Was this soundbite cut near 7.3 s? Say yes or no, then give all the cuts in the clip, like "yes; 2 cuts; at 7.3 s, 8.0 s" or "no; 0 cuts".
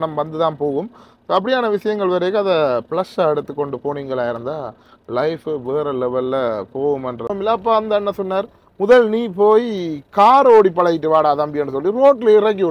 yes; 1 cut; at 7.3 s